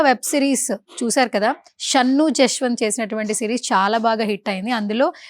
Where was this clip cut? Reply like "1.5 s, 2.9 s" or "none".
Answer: 1.7 s